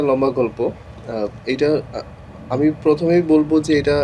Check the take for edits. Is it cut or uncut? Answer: uncut